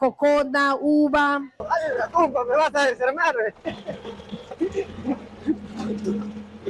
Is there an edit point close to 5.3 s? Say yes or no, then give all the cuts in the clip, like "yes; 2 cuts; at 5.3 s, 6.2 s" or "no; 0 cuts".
no; 1 cut; at 1.6 s